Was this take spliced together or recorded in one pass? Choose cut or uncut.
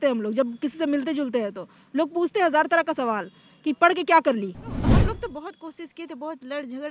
cut